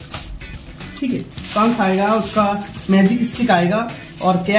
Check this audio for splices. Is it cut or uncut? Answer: uncut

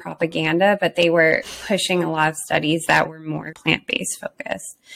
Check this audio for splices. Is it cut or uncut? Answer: cut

